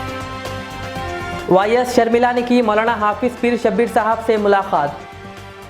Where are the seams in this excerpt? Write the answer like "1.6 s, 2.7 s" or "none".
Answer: 1.4 s